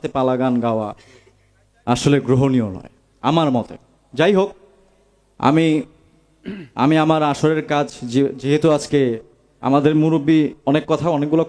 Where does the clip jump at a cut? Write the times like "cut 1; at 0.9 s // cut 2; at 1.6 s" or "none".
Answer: none